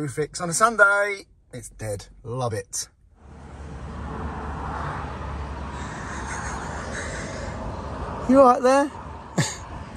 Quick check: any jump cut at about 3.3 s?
yes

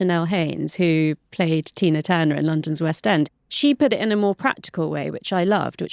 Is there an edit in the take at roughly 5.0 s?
no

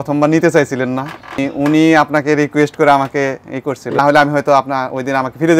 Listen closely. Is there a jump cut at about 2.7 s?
no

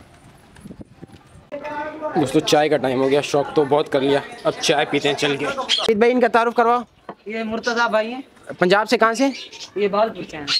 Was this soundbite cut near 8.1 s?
no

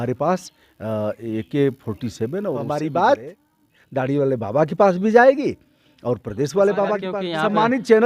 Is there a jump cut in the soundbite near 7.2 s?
yes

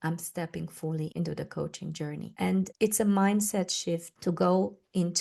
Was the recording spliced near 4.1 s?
yes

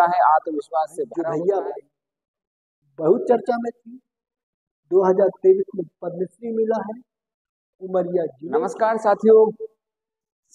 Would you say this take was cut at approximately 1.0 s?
yes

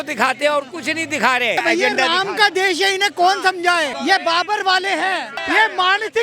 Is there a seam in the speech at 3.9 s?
yes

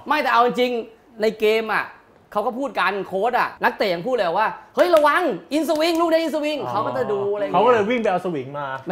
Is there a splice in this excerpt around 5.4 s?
no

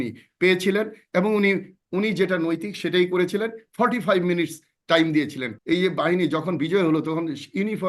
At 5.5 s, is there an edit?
yes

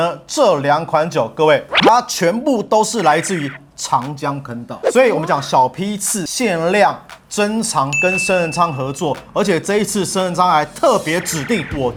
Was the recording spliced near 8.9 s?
no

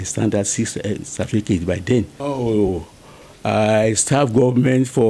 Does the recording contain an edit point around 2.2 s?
yes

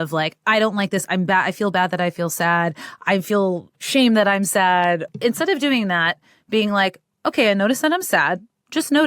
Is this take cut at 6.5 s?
no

